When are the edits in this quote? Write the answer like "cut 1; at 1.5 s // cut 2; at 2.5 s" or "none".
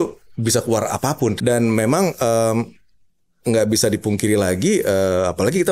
cut 1; at 1.4 s